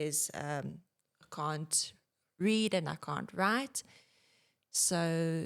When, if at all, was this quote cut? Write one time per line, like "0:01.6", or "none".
none

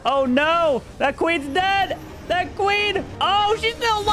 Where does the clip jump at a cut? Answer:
0:03.1

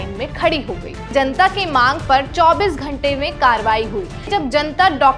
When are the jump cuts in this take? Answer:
0:01.1
0:04.3

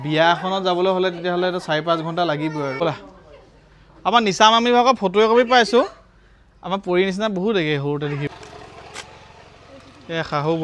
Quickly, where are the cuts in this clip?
0:02.8
0:08.3

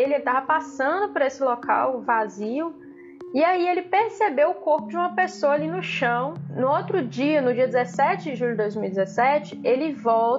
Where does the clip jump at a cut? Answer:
0:06.5

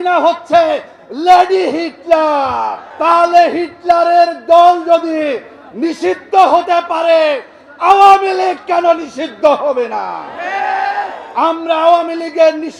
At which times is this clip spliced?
0:02.8

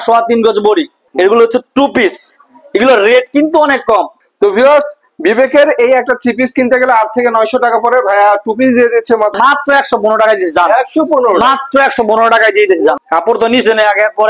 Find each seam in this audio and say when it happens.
0:01.0
0:04.2
0:09.3
0:13.0

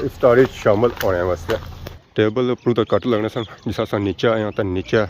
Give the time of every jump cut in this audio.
0:01.7

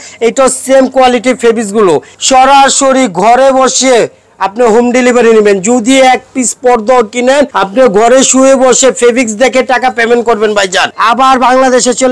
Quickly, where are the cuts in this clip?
0:02.1
0:07.6
0:10.9

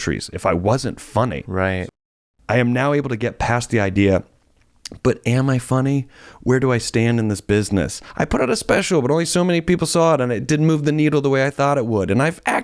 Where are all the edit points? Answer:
0:01.8
0:08.0

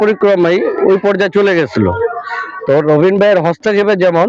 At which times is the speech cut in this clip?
none

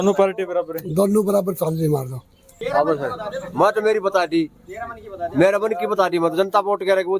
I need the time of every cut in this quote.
0:02.5

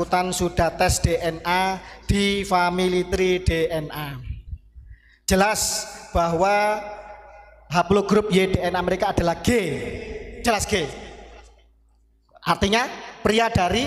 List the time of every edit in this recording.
none

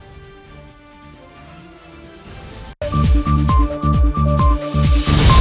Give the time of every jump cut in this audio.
0:02.8

